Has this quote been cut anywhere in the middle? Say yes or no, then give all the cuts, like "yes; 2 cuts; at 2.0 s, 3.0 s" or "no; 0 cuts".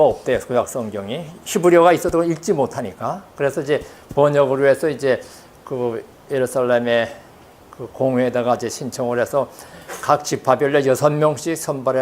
yes; 1 cut; at 1.4 s